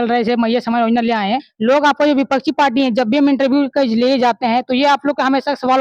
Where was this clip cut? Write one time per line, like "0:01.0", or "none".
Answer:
0:01.5